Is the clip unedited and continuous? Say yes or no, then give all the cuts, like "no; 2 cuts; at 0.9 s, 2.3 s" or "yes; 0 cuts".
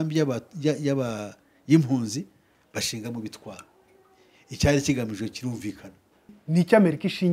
no; 1 cut; at 6.4 s